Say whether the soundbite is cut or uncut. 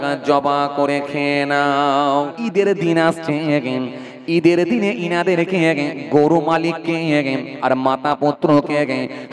cut